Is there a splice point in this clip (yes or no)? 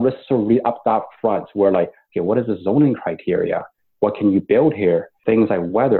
no